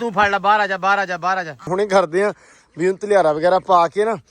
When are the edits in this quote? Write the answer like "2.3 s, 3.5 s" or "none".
1.7 s